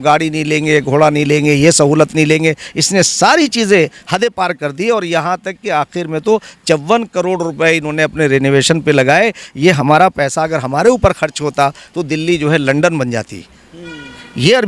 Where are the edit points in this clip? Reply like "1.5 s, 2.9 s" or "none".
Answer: none